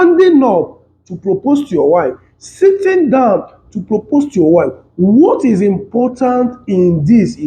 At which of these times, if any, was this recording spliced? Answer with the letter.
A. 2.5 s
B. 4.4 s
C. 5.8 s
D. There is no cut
D